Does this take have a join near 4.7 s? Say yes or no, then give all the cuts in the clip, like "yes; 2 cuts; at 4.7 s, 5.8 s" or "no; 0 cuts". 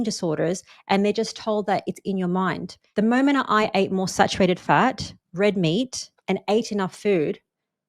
no; 1 cut; at 2.7 s